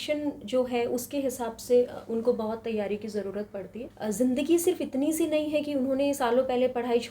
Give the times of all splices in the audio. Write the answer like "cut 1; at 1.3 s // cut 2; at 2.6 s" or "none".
cut 1; at 3.9 s